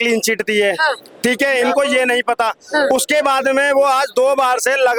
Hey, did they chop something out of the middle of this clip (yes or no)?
no